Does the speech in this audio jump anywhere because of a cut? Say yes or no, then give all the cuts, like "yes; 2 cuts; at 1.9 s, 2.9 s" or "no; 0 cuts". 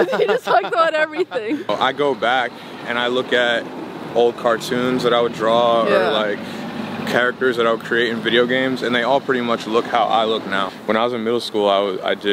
yes; 2 cuts; at 1.7 s, 10.6 s